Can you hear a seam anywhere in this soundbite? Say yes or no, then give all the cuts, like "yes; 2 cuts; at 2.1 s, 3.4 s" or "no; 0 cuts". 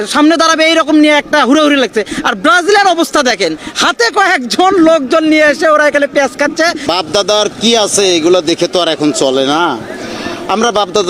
yes; 1 cut; at 6.8 s